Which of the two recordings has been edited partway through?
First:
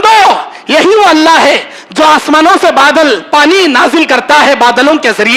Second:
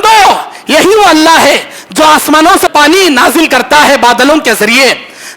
second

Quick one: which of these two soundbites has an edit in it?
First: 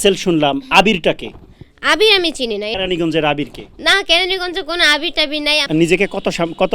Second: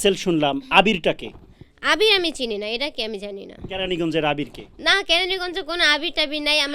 first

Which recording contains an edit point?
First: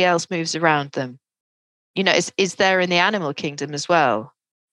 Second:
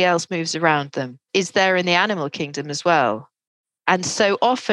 second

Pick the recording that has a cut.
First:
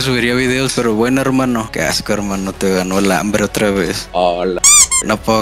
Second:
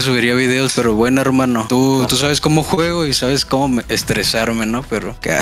first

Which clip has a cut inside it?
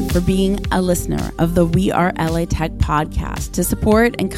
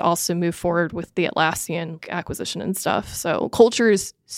second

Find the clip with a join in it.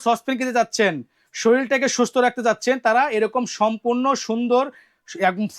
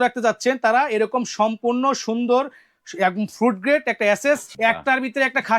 second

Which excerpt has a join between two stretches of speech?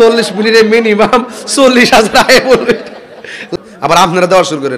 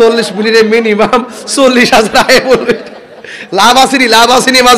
first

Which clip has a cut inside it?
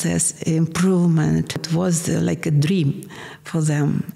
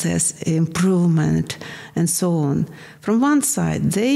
first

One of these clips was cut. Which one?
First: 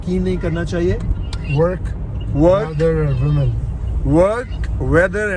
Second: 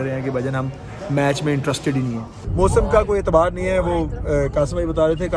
second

